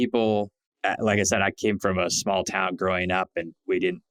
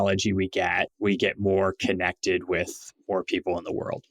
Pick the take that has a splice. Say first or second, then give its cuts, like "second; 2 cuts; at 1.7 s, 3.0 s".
second; 1 cut; at 0.9 s